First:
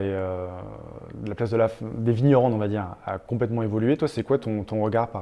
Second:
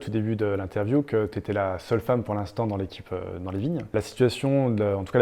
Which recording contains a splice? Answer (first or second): second